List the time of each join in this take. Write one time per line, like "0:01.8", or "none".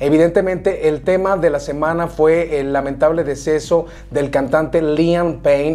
none